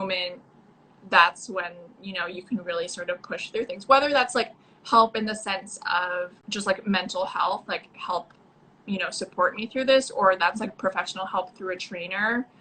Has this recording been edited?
yes; 1 cut; at 6.4 s

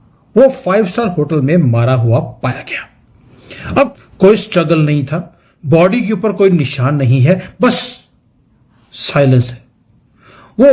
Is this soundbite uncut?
no; 1 cut; at 4.0 s

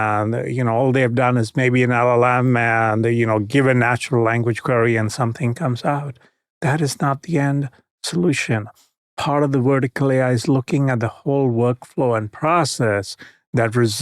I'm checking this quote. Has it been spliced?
no; 0 cuts

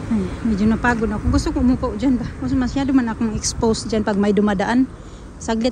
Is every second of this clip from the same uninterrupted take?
yes; 0 cuts

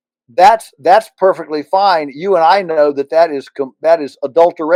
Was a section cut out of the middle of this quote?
no; 0 cuts

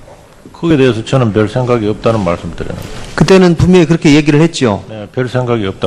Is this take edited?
no; 0 cuts

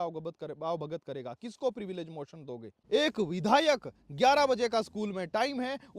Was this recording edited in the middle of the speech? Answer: yes; 1 cut; at 2.7 s

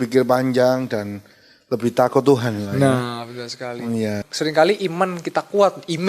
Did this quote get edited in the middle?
yes; 1 cut; at 4.3 s

